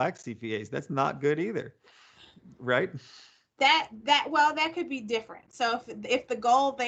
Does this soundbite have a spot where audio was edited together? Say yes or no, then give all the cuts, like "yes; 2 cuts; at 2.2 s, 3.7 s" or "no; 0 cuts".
no; 0 cuts